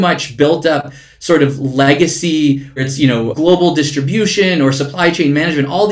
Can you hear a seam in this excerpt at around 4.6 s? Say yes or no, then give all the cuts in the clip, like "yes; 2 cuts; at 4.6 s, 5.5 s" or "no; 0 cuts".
no; 1 cut; at 3.0 s